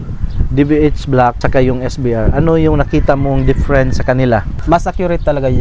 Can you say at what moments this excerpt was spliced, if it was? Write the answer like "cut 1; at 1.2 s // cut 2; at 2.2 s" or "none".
cut 1; at 1.4 s // cut 2; at 4.5 s